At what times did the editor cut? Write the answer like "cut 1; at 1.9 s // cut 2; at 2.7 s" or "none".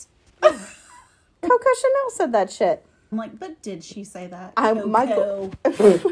cut 1; at 3.1 s